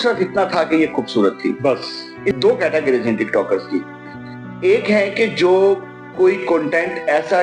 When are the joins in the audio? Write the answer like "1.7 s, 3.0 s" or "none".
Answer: 2.3 s